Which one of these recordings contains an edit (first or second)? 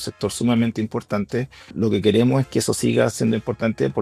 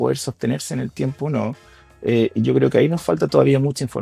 first